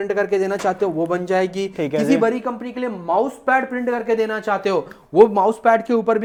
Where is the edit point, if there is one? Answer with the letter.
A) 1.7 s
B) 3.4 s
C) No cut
C